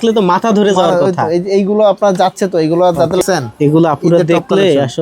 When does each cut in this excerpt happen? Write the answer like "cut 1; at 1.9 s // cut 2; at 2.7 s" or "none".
cut 1; at 3.2 s

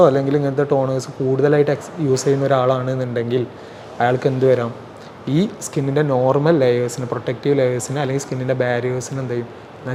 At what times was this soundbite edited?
none

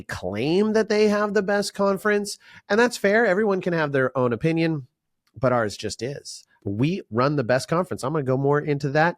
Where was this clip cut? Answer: cut 1; at 6.6 s

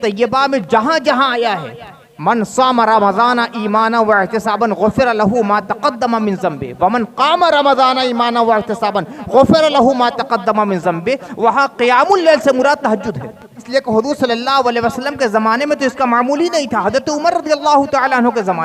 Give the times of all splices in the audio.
cut 1; at 13.6 s

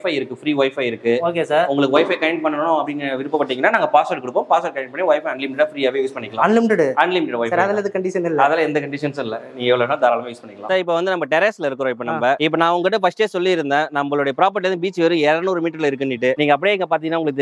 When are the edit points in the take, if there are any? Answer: none

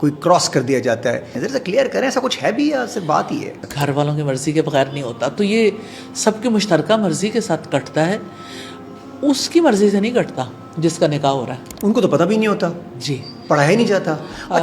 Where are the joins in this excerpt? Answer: cut 1; at 1.4 s // cut 2; at 3.6 s

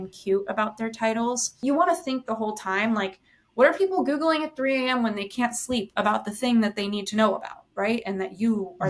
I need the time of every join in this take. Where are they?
cut 1; at 1.6 s

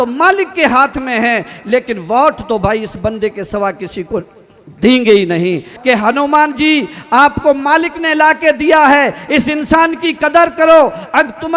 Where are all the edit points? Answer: cut 1; at 5.7 s

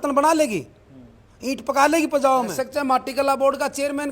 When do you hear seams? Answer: cut 1; at 2.6 s

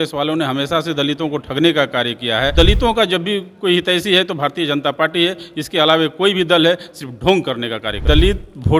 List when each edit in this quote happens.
cut 1; at 2.5 s // cut 2; at 8.0 s

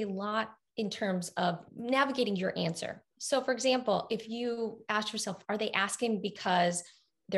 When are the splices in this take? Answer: cut 1; at 1.7 s

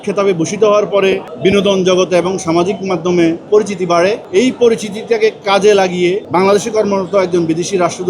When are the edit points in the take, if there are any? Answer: cut 1; at 1.3 s // cut 2; at 3.5 s // cut 3; at 4.2 s // cut 4; at 6.2 s

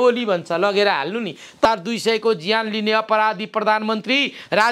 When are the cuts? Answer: cut 1; at 1.7 s

